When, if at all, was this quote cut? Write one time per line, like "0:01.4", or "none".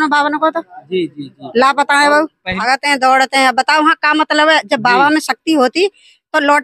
0:02.6